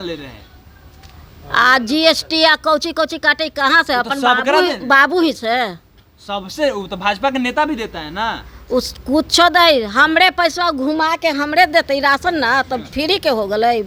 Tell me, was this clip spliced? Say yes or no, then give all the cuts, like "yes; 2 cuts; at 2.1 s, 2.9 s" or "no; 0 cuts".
no; 0 cuts